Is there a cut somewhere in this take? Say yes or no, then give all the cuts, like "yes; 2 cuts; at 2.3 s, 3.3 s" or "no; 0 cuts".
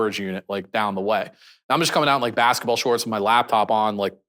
no; 0 cuts